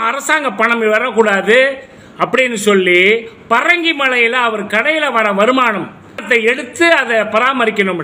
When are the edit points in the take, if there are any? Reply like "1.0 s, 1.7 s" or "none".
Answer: 6.2 s